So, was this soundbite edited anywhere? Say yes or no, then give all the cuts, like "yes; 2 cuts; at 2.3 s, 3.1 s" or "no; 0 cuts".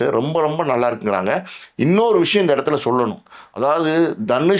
no; 0 cuts